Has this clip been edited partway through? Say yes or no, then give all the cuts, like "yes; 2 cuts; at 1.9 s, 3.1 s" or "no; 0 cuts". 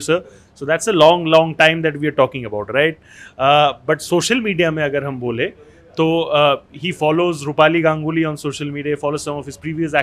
no; 0 cuts